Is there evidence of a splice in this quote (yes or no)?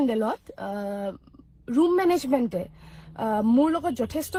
no